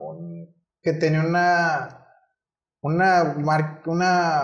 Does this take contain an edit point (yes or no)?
no